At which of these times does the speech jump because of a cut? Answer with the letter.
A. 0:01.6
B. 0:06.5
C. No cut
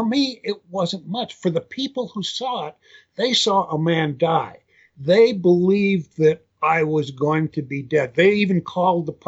B